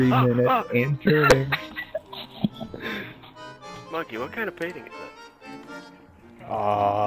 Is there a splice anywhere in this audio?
yes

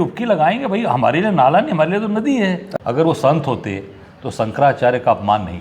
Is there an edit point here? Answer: yes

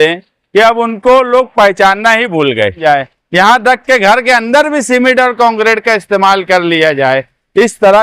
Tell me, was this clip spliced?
yes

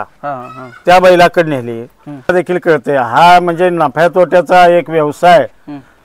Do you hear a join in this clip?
yes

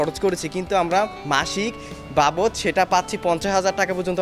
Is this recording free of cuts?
yes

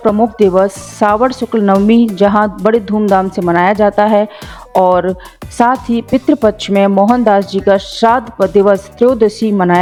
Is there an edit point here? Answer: no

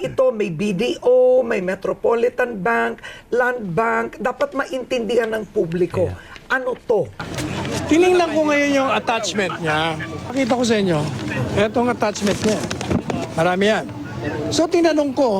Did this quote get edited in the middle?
yes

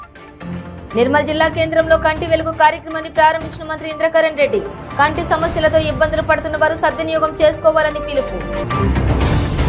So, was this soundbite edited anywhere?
no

